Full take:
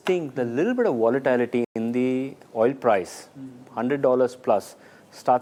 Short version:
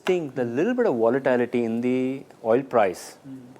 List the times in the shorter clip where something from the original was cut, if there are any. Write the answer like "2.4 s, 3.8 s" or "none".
1.7 s